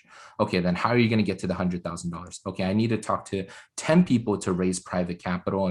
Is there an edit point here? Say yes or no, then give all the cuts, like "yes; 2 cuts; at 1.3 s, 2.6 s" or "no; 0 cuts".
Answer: no; 0 cuts